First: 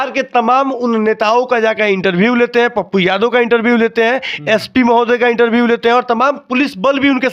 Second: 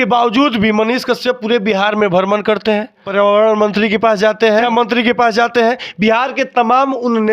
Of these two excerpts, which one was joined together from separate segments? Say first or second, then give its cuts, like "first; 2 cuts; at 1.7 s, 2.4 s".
second; 2 cuts; at 3.0 s, 4.7 s